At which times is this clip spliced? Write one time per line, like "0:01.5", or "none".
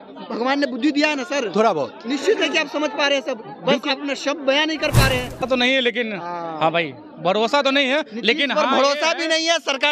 0:05.4